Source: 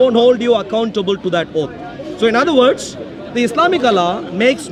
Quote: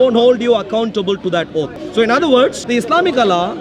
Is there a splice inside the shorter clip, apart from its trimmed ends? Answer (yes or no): yes